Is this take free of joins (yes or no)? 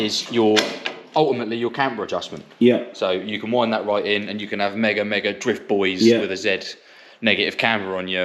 yes